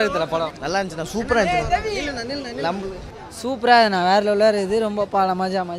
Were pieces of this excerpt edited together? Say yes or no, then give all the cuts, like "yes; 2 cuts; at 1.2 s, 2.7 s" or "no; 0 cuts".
no; 0 cuts